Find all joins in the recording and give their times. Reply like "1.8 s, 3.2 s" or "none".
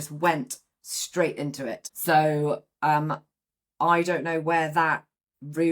1.9 s